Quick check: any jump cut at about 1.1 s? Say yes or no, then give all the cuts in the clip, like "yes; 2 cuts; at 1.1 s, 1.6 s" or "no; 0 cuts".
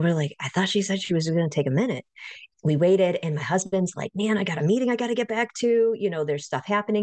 no; 1 cut; at 2.4 s